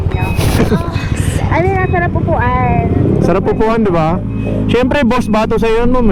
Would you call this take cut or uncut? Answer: uncut